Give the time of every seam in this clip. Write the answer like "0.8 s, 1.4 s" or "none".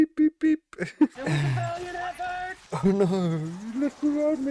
1.2 s

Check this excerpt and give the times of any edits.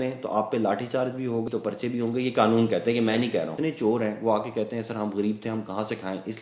1.5 s, 3.5 s

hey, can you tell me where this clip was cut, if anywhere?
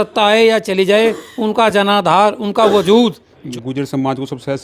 3.4 s

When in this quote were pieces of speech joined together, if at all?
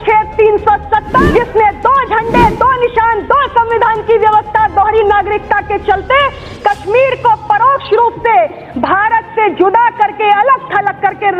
1.3 s

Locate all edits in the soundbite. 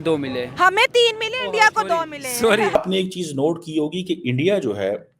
2.7 s

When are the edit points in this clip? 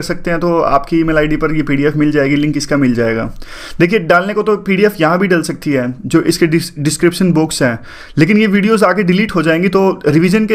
none

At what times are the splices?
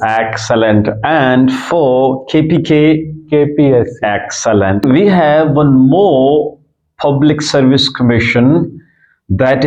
4.8 s

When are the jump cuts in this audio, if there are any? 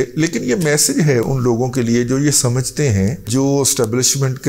1.2 s, 3.3 s

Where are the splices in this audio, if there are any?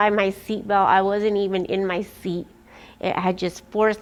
none

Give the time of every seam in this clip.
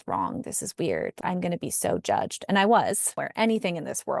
3.1 s

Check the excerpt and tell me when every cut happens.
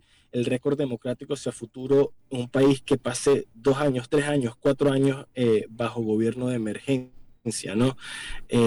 none

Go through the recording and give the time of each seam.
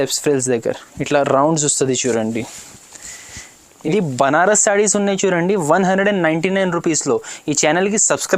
3.7 s

